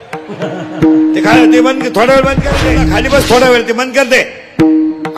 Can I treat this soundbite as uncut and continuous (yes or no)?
no